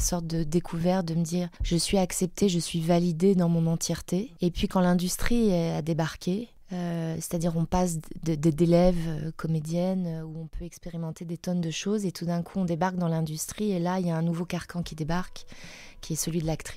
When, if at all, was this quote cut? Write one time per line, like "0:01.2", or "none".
0:01.6
0:04.3
0:06.6